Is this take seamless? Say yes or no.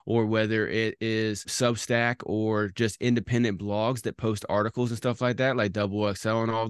no